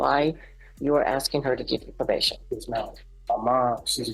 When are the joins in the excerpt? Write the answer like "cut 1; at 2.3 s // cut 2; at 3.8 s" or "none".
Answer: cut 1; at 3.1 s

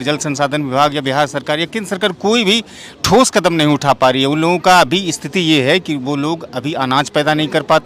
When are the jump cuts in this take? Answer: none

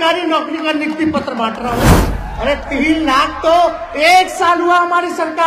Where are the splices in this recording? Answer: cut 1; at 2.0 s

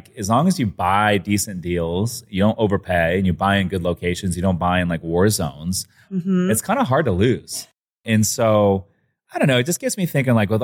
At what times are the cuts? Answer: cut 1; at 6.1 s

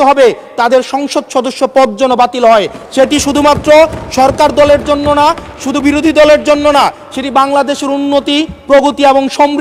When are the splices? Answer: none

